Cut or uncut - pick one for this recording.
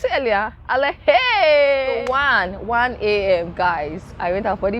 cut